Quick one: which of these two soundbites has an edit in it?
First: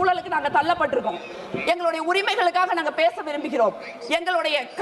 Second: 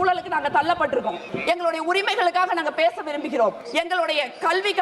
second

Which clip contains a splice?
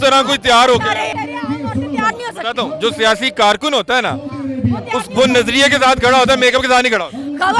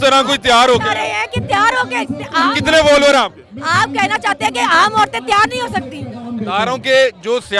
first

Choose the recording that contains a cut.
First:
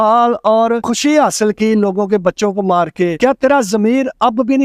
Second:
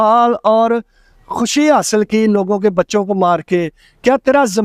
first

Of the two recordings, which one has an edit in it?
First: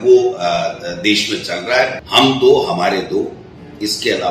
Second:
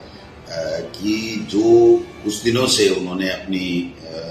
first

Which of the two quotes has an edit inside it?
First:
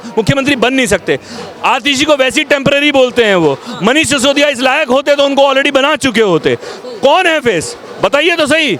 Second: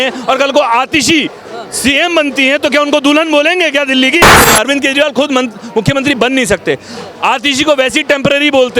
second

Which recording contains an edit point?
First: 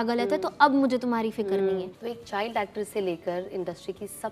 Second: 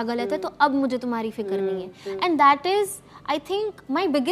first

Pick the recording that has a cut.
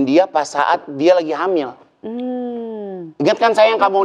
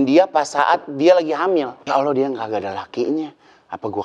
second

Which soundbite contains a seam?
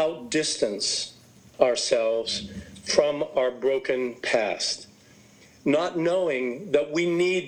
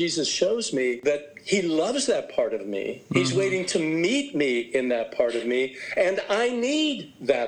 second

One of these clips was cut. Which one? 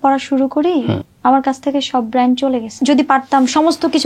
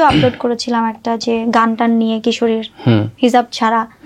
first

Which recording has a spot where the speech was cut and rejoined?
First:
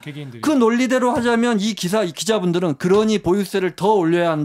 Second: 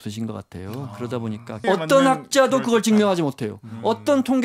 second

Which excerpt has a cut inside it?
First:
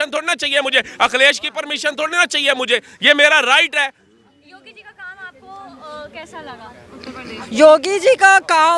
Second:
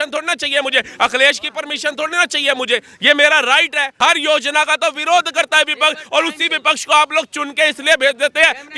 second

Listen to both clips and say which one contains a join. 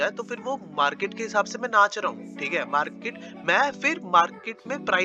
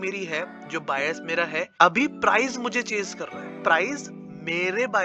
second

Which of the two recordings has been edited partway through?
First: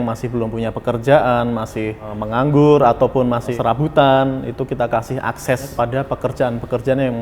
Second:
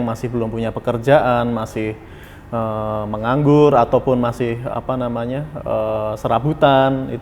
first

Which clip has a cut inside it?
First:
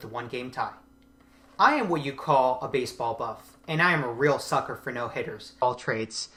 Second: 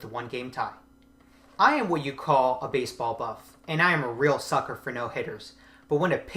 second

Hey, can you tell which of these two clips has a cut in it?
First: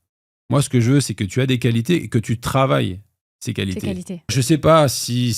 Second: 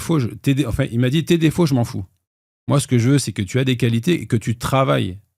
first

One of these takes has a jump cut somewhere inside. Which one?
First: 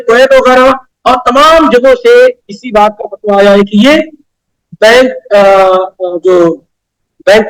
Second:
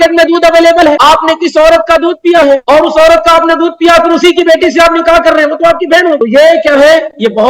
second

